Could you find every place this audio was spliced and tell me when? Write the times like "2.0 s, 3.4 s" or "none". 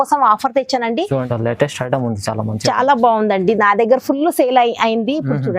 1.2 s